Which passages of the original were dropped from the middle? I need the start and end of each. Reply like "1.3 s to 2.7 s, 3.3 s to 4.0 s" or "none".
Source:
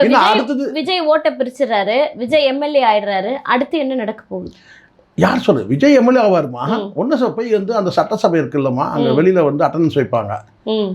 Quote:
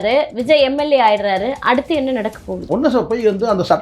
4.5 s to 6.9 s